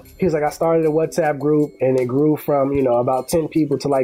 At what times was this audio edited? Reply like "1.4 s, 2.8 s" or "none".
none

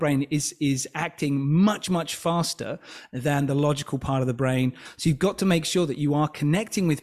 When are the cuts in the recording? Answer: 4.9 s

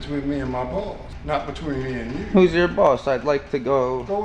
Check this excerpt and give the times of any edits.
1.1 s

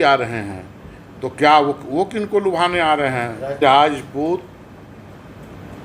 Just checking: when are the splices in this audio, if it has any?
3.6 s

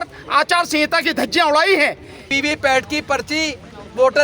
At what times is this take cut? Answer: 2.3 s

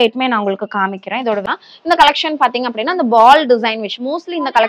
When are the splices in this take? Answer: 1.5 s

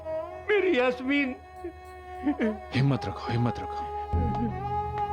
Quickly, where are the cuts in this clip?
none

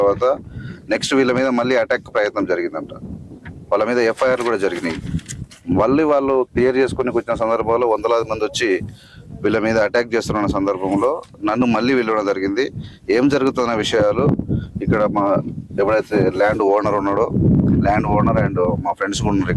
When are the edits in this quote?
none

